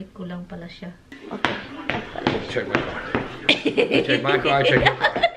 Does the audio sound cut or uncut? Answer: cut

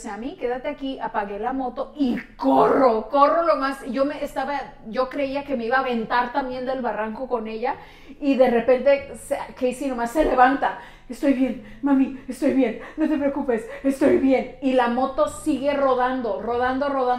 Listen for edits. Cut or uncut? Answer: uncut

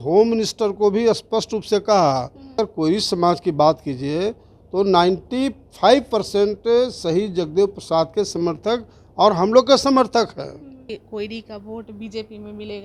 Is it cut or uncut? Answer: cut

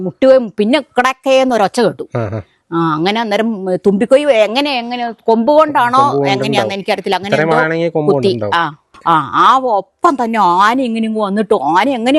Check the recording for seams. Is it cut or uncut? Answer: cut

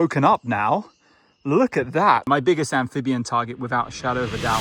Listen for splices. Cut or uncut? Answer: cut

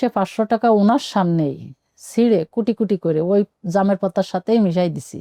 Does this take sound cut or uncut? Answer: uncut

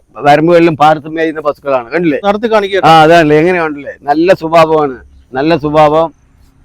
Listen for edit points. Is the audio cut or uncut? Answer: cut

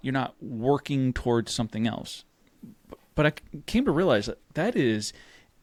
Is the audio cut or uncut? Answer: uncut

